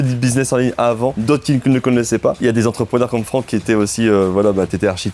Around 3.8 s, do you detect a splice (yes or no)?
no